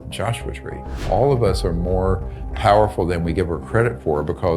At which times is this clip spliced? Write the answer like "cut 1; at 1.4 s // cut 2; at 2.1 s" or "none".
cut 1; at 1.0 s